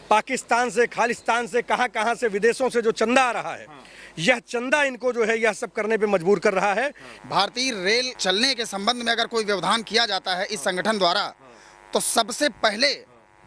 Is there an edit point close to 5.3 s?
no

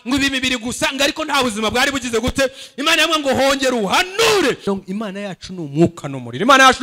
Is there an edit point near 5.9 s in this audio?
no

